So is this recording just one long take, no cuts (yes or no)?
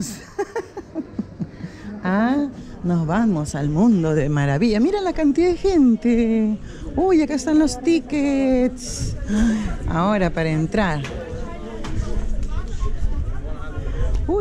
yes